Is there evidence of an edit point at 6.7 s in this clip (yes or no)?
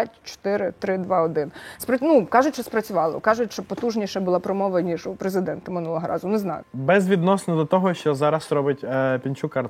yes